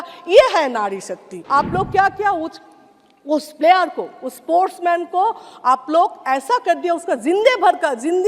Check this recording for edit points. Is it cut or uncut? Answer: cut